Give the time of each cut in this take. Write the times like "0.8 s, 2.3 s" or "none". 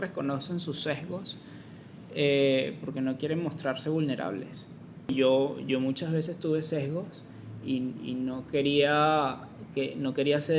5.1 s